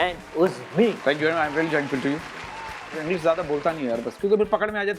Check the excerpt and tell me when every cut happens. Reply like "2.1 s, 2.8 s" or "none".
1.0 s, 2.9 s

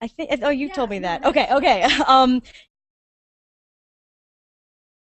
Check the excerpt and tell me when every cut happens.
none

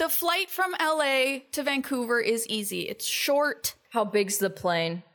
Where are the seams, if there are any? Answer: 3.5 s

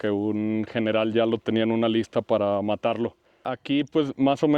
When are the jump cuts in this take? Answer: 3.5 s

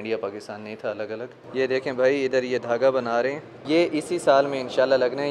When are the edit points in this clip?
1.4 s, 3.6 s

